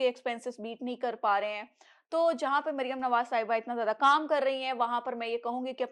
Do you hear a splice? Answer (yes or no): no